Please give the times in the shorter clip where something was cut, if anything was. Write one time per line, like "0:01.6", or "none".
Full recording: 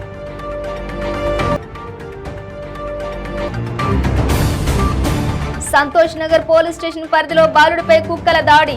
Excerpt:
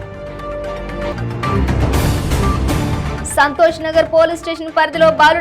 0:01.1